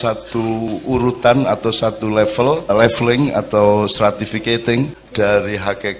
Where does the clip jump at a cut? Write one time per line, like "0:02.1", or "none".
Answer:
0:02.7
0:05.0